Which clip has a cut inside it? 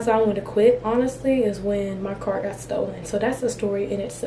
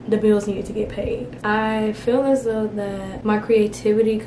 second; 2 cuts; at 1.3 s, 3.1 s

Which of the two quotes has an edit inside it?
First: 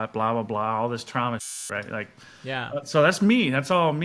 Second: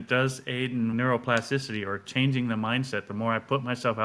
second; 1 cut; at 0.9 s

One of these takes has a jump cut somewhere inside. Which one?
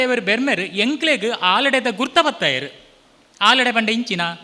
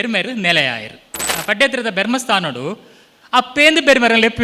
second; 1 cut; at 1.4 s

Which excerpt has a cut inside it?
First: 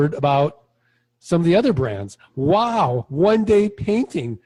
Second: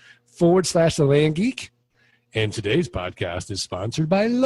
second; 1 cut; at 1.7 s

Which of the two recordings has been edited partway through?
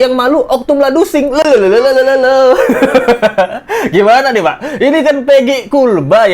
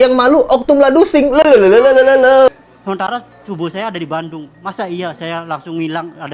second; 1 cut; at 2.5 s

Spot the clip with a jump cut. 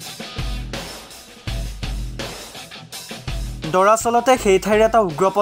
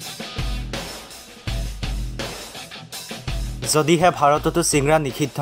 first; 1 cut; at 3.5 s

